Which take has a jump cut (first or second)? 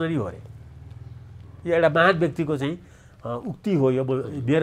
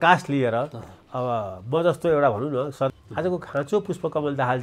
second